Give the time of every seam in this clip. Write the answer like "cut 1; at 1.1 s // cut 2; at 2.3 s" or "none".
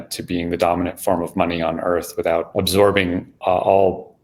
cut 1; at 2.5 s // cut 2; at 3.3 s